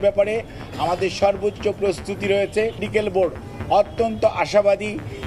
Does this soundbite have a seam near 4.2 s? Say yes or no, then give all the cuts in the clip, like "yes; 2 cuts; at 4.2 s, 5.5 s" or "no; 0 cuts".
no; 1 cut; at 2.9 s